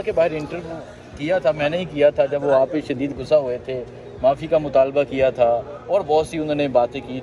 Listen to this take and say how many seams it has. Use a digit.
0